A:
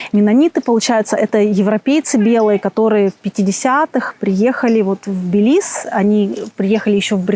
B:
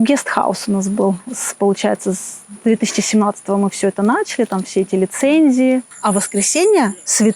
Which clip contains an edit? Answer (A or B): B